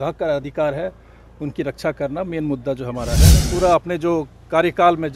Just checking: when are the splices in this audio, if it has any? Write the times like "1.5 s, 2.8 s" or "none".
3.4 s